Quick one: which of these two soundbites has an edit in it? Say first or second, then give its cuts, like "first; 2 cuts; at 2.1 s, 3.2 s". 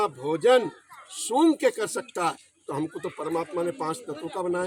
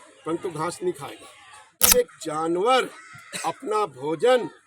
second; 1 cut; at 1.9 s